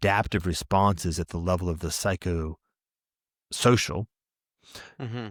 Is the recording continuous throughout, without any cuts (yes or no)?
yes